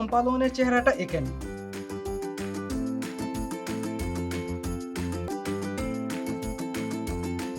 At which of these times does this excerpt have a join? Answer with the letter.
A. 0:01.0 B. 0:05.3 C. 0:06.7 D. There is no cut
B